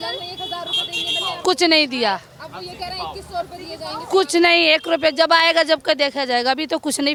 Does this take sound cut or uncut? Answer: uncut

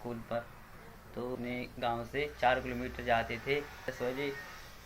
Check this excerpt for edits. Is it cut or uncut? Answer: cut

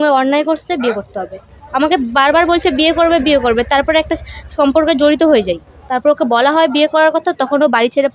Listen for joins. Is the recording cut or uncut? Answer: cut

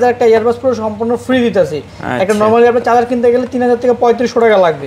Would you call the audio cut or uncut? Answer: uncut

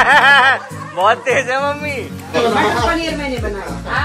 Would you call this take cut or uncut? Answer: cut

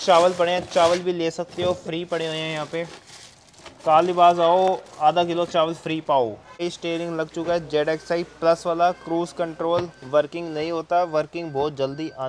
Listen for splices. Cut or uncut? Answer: cut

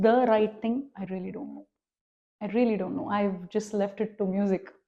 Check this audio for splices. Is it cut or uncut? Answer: uncut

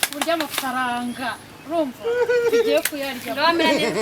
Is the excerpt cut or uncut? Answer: uncut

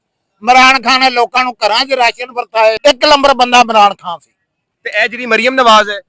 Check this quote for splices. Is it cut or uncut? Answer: cut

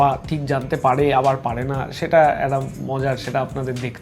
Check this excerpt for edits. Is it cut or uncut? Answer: uncut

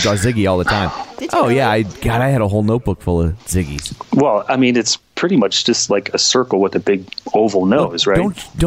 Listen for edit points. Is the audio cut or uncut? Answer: cut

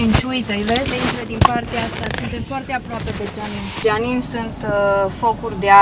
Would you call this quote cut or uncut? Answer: uncut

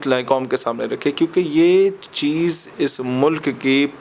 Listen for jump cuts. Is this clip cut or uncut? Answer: uncut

